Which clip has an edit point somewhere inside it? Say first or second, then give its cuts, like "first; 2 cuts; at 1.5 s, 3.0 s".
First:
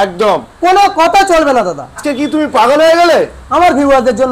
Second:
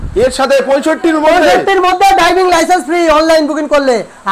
first; 1 cut; at 2.0 s